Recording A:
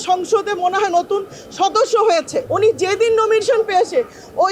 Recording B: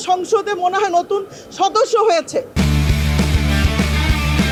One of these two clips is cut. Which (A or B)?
A